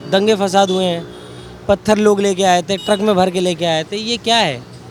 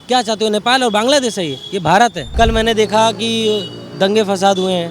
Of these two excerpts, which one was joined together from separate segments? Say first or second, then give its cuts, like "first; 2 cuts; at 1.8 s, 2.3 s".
second; 1 cut; at 2.2 s